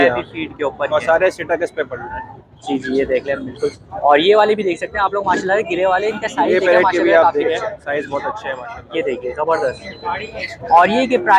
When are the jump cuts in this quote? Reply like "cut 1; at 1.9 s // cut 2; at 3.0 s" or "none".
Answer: none